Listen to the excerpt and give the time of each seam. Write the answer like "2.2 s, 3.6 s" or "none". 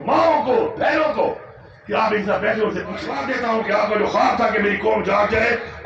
3.2 s